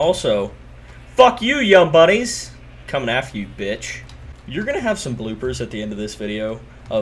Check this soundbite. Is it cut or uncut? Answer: cut